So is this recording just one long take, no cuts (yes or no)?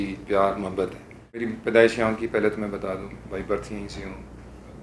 no